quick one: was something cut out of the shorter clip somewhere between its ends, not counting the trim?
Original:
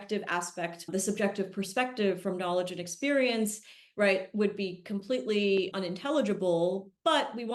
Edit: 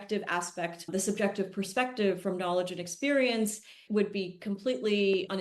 yes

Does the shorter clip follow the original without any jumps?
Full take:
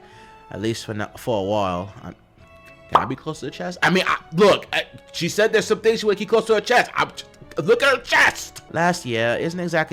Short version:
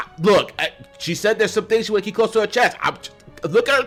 yes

